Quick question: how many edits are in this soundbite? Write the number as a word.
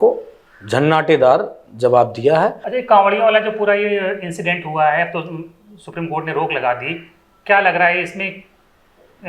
one